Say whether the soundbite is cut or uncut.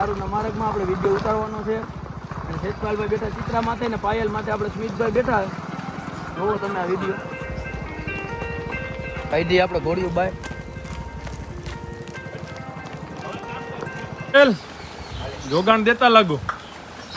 cut